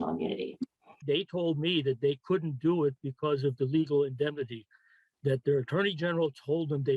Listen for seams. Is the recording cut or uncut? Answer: cut